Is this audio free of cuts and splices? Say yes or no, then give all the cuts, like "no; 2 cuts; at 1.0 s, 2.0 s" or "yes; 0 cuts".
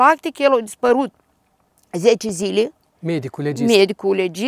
yes; 0 cuts